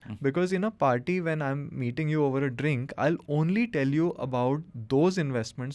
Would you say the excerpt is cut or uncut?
uncut